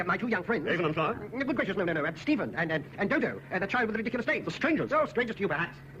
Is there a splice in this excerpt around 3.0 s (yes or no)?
no